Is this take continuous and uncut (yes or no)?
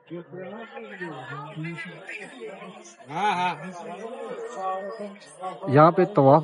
yes